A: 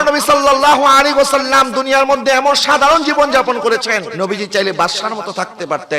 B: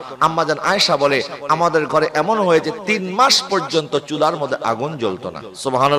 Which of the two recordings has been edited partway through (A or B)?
A